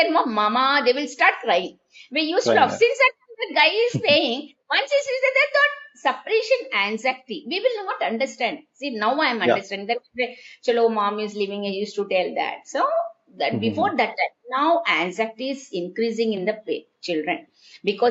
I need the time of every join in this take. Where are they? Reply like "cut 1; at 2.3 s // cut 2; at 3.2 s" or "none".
none

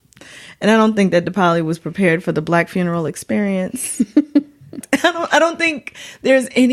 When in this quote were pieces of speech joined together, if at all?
cut 1; at 4.8 s

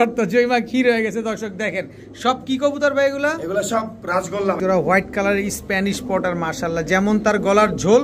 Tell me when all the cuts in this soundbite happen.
cut 1; at 4.6 s

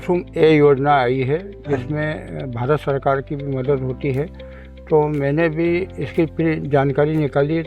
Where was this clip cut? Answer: none

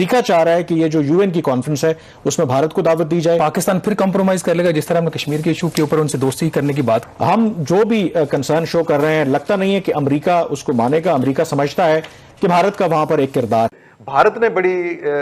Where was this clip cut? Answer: cut 1; at 3.4 s // cut 2; at 7.1 s // cut 3; at 13.7 s

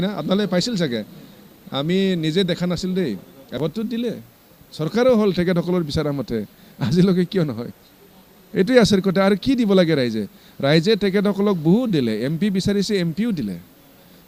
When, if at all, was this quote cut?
cut 1; at 3.4 s

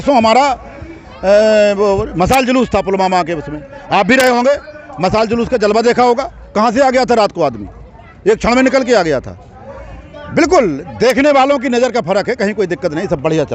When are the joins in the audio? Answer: none

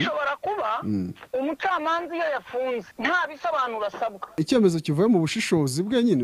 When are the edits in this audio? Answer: cut 1; at 1.2 s // cut 2; at 2.9 s // cut 3; at 4.4 s

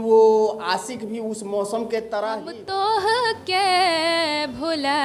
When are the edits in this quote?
cut 1; at 2.5 s

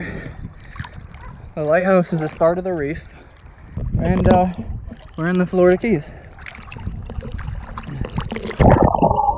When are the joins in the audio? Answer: cut 1; at 3.9 s

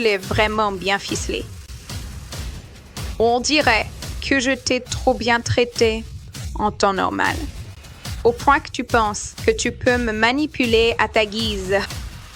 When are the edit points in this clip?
none

